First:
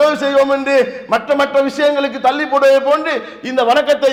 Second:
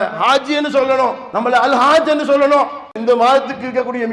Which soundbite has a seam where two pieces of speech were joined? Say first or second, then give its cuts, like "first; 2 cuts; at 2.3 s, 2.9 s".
second; 2 cuts; at 1.2 s, 2.9 s